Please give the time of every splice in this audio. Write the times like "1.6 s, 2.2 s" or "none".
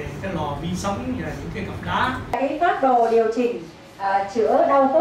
2.4 s